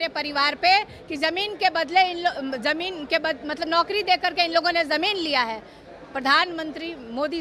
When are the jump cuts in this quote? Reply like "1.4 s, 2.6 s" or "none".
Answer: none